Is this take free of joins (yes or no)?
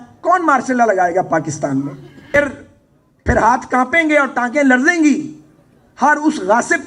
no